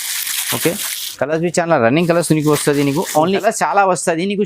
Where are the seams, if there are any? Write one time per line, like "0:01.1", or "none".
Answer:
0:03.4